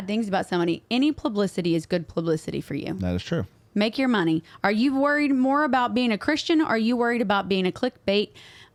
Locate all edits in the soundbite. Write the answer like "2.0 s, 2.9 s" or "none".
none